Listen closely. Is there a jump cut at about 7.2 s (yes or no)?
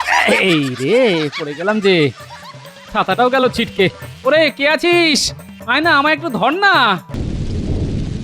yes